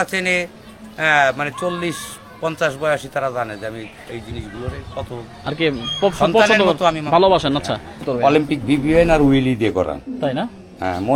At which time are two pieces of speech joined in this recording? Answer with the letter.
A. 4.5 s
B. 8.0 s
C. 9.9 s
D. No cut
B